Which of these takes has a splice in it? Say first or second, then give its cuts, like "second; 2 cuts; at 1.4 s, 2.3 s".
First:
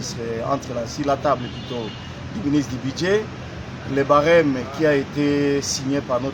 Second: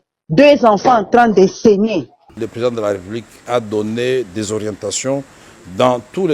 second; 1 cut; at 2.3 s